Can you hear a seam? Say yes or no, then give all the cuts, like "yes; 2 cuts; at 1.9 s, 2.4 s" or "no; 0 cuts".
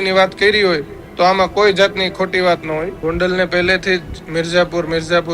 yes; 1 cut; at 2.9 s